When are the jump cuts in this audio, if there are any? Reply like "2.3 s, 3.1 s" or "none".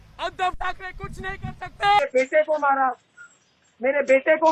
2.0 s